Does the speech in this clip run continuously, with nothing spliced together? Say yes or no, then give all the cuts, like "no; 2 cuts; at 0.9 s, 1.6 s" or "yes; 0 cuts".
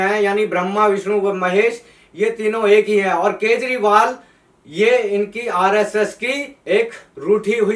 no; 1 cut; at 6.5 s